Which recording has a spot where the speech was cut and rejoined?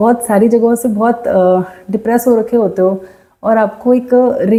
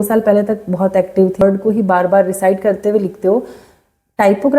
second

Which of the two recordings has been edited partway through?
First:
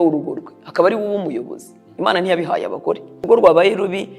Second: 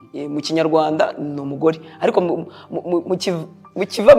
first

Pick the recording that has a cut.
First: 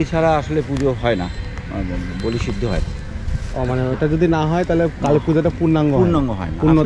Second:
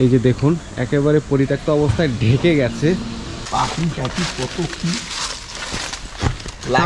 second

